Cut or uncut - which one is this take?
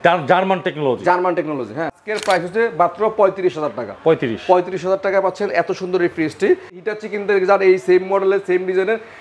cut